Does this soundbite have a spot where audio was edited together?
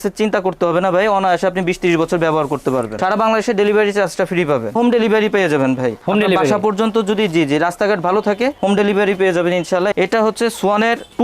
yes; 3 cuts; at 2.9 s, 4.8 s, 9.9 s

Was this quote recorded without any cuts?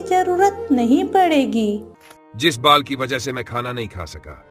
no; 1 cut; at 1.9 s

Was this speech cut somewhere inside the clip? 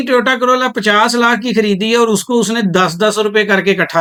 no; 0 cuts

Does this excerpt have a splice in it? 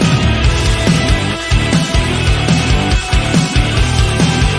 yes; 1 cut; at 2.1 s

